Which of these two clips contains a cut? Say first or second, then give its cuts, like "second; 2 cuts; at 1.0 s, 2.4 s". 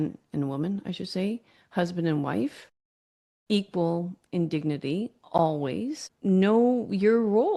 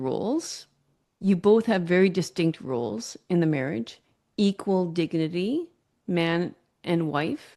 first; 1 cut; at 6.1 s